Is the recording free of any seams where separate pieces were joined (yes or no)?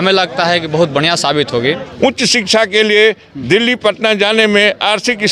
no